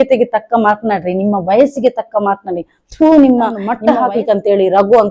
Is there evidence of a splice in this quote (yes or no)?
yes